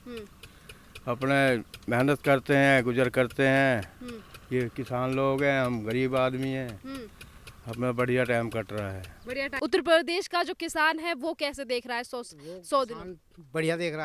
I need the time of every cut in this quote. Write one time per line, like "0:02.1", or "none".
0:09.5

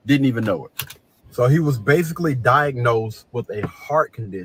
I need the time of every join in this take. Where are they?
none

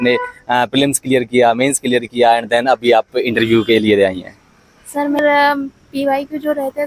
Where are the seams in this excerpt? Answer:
0:05.2

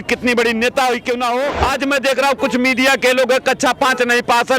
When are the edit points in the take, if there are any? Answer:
0:01.6

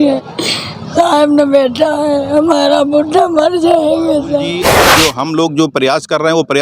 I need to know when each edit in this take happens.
0:04.8

